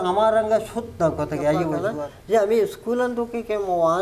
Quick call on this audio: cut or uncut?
cut